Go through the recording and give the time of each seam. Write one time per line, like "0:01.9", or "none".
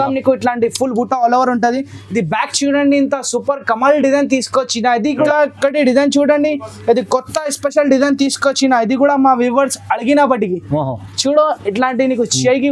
0:05.3